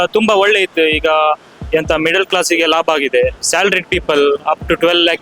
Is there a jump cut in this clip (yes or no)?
yes